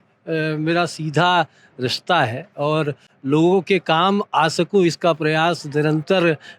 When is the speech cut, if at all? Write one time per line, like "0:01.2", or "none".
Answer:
none